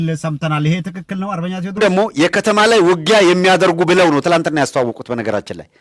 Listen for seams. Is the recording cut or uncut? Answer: cut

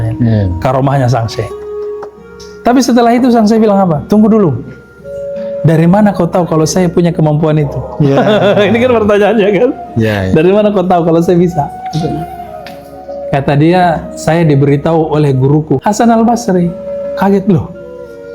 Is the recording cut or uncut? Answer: cut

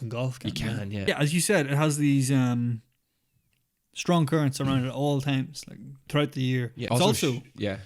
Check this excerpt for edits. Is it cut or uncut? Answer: cut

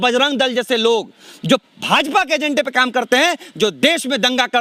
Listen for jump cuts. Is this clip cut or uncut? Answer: uncut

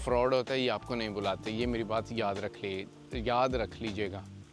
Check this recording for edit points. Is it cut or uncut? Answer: uncut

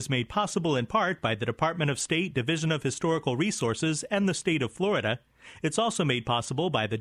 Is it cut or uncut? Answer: uncut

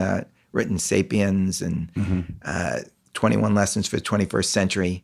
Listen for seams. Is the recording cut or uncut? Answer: uncut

